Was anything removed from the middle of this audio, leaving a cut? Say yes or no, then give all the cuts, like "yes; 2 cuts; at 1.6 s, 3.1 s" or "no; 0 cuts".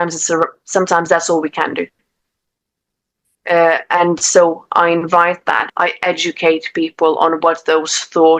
yes; 1 cut; at 5.7 s